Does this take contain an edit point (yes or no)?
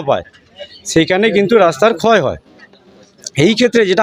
no